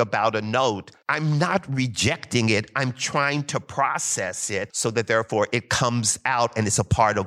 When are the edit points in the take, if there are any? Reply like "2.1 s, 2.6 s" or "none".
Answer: 0.9 s, 4.7 s